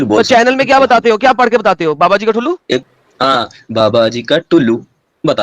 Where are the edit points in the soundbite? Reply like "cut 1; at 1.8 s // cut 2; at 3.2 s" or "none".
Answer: cut 1; at 2.9 s